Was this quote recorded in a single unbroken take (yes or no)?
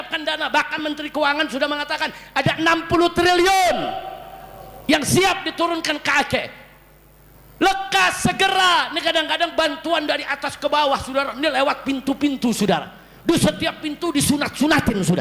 yes